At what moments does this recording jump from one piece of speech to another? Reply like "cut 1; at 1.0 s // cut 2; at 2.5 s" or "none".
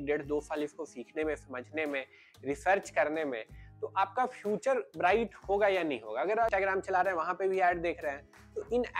cut 1; at 6.5 s